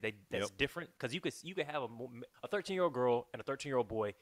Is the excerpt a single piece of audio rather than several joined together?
no; 1 cut; at 2.2 s

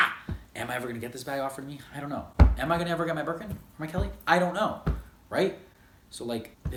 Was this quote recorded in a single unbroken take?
yes; 0 cuts

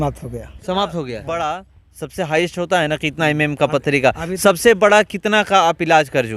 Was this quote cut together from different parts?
yes; 1 cut; at 1.2 s

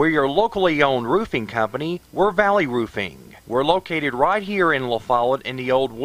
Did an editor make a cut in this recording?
no; 0 cuts

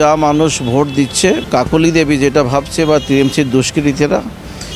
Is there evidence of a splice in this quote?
yes; 1 cut; at 1.4 s

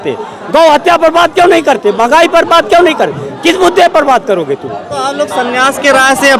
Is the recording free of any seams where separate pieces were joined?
yes; 0 cuts

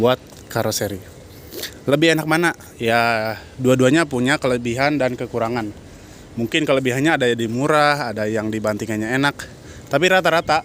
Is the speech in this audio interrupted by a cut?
no; 0 cuts

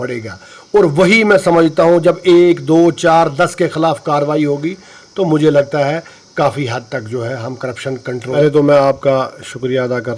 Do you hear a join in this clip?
yes; 1 cut; at 8.4 s

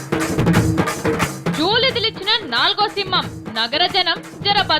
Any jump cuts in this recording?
yes; 1 cut; at 1.2 s

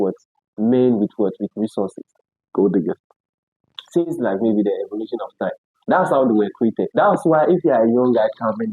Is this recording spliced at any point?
yes; 1 cut; at 6.9 s

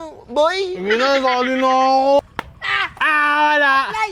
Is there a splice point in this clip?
yes; 1 cut; at 2.2 s

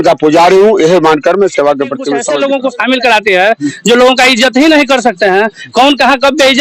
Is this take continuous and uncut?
no; 1 cut; at 2.2 s

